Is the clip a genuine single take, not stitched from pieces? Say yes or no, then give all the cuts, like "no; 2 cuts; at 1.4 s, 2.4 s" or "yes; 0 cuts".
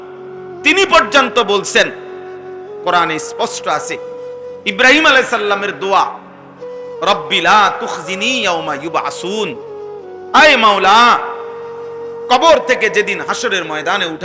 yes; 0 cuts